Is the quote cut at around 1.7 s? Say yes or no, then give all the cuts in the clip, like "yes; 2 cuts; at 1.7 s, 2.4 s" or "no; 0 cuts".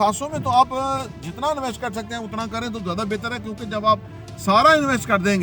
no; 0 cuts